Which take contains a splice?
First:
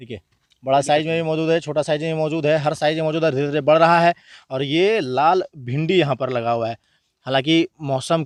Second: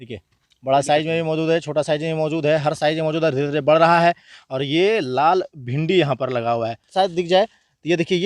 second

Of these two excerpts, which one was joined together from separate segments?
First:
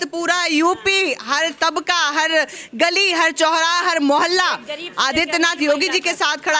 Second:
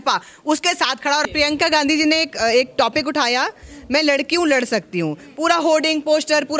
second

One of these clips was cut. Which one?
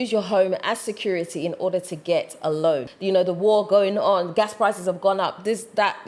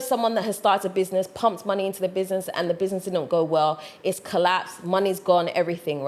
first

